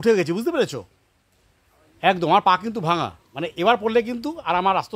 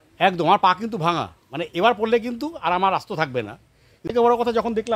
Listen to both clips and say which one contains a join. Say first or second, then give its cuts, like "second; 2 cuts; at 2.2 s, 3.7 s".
second; 1 cut; at 4.0 s